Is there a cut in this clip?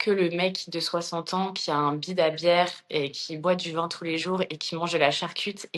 no; 0 cuts

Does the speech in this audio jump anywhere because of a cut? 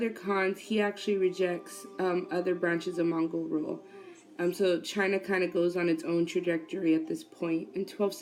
no; 0 cuts

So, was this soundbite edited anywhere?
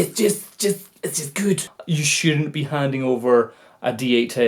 yes; 1 cut; at 1.7 s

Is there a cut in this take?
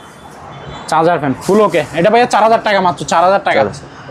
no; 0 cuts

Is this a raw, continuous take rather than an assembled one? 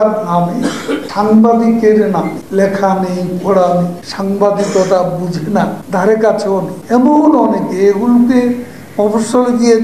no; 5 cuts; at 1.1 s, 2.4 s, 4.0 s, 5.8 s, 6.8 s

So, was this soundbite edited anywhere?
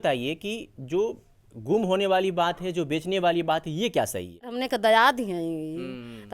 yes; 1 cut; at 4.5 s

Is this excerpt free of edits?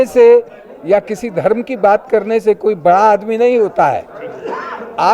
yes; 0 cuts

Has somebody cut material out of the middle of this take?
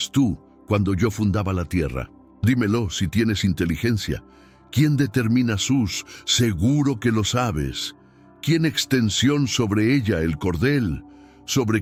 no; 0 cuts

